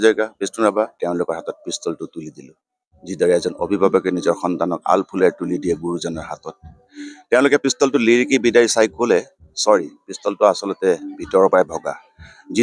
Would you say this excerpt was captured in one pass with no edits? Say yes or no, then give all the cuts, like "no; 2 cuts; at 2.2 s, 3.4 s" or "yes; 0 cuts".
no; 1 cut; at 1.0 s